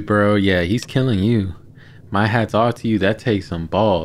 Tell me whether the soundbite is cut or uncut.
uncut